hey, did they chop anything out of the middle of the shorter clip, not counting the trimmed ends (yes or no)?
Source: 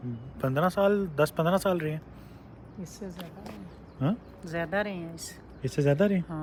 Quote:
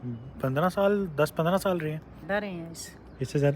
yes